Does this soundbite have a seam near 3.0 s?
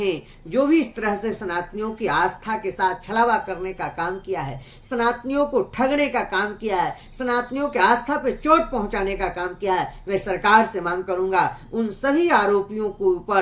no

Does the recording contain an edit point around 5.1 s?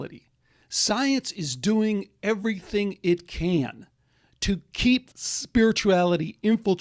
yes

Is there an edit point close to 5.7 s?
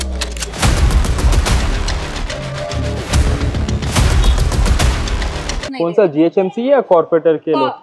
yes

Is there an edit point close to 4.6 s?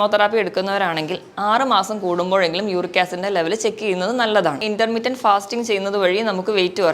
yes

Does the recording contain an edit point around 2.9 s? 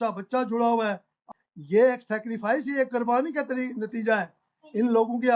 no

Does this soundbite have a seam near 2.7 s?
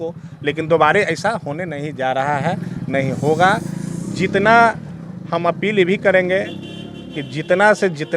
no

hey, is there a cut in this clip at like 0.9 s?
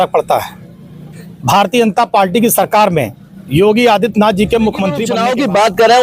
no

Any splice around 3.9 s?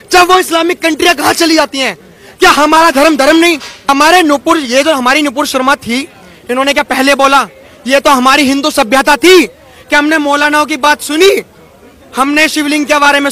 yes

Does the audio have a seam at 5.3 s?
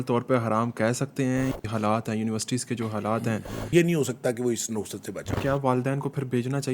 yes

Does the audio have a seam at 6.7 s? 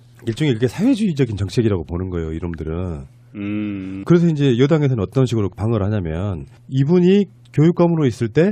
no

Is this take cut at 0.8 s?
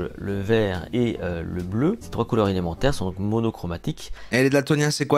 yes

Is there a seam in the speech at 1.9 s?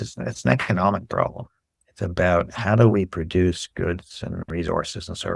no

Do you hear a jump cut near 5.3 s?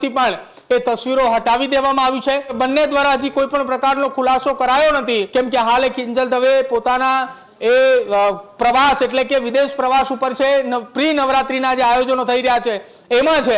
yes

